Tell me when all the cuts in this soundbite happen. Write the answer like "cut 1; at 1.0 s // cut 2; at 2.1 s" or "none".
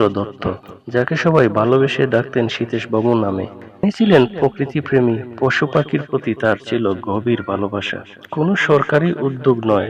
cut 1; at 3.8 s